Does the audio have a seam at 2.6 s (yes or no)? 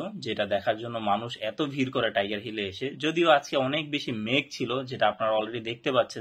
no